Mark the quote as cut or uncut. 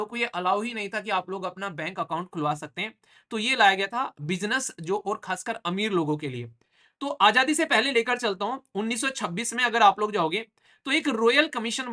uncut